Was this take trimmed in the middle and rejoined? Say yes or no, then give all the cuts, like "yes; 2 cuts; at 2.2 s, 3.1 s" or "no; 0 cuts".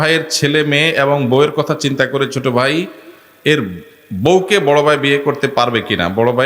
no; 0 cuts